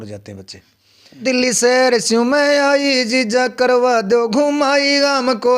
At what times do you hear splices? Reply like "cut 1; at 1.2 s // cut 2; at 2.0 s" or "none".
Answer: cut 1; at 1.2 s